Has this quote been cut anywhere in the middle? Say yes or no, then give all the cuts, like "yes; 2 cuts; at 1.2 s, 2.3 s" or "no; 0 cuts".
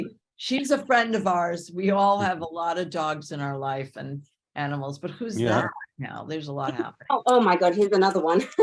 yes; 1 cut; at 7.0 s